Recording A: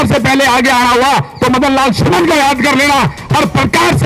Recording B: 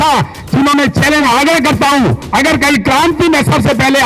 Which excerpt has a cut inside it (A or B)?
B